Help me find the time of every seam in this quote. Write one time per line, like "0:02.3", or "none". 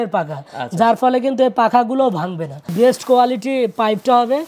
0:02.7